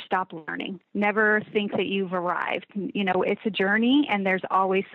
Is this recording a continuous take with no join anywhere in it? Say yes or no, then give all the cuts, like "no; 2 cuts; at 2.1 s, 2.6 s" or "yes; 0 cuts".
yes; 0 cuts